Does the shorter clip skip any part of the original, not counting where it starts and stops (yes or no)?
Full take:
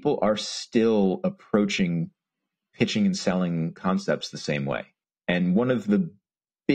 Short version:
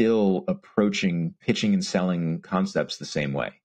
yes